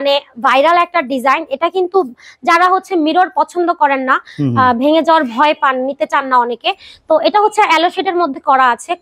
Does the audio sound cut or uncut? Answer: uncut